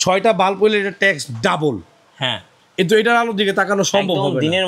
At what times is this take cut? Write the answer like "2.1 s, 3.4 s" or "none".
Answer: 2.6 s